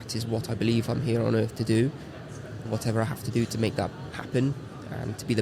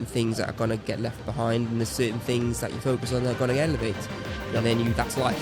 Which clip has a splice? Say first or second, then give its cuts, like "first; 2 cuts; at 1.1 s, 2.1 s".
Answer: first; 1 cut; at 2.7 s